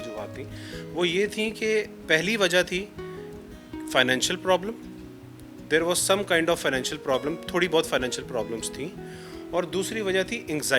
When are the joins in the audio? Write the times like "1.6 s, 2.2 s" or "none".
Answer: none